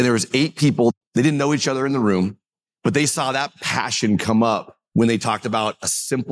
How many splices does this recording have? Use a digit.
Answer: 1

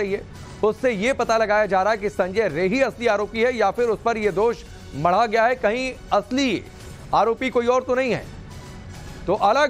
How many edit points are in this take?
1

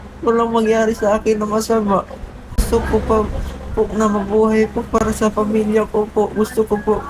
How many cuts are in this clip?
1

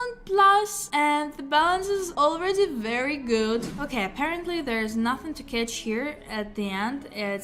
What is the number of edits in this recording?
1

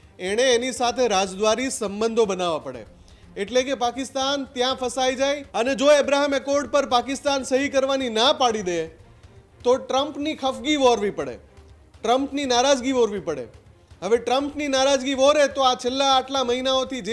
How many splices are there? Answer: 1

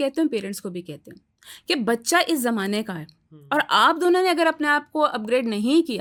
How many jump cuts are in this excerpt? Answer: 0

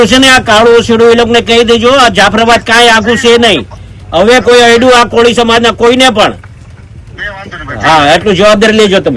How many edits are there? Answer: 0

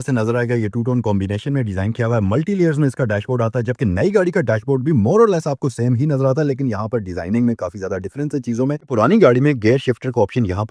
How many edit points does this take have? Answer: 1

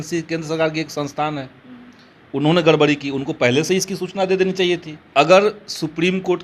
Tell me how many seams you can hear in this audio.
1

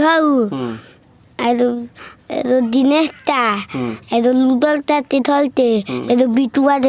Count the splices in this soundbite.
0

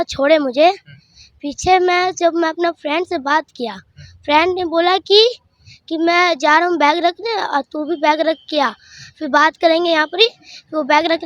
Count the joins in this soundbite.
0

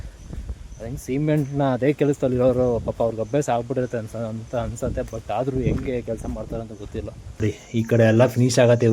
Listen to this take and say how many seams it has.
1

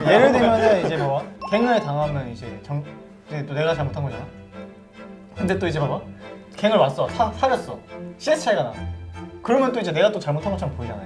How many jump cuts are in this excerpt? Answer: 1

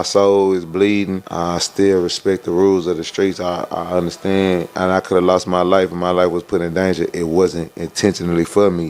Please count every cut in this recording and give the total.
2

